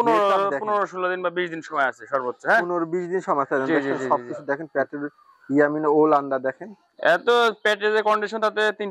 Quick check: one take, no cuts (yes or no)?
yes